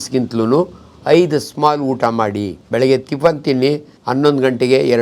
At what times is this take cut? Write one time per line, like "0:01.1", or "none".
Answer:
0:02.5
0:03.9